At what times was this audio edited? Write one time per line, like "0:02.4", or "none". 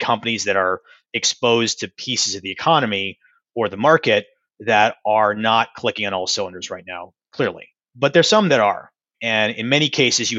0:07.8
0:09.1